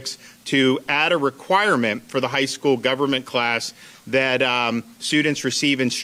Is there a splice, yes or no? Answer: no